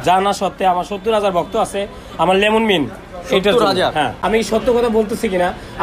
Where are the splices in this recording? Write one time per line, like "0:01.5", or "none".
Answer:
0:04.2